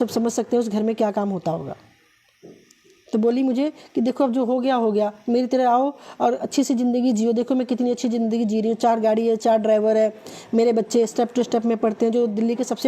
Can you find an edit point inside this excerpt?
no; 0 cuts

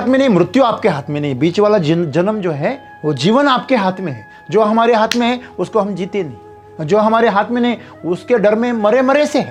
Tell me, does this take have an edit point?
no; 0 cuts

